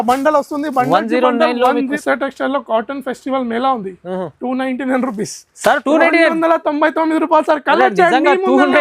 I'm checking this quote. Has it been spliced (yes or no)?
yes